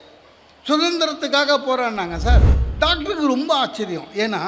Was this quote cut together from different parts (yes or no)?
yes